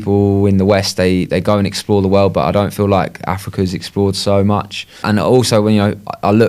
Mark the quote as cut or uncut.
cut